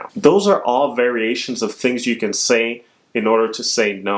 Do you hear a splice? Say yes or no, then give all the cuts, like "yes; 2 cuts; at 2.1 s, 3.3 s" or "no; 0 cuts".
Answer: no; 0 cuts